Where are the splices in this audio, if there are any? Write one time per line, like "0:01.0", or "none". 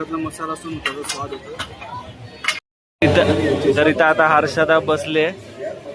0:02.6